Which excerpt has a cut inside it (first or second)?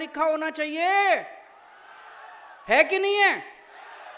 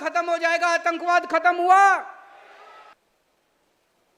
second